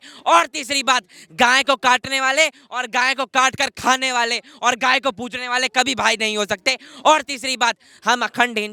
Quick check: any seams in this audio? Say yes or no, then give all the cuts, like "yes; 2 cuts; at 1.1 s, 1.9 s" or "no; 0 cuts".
no; 0 cuts